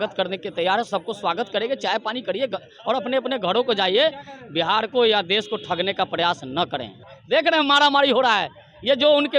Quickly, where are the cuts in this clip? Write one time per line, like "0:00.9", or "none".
0:07.1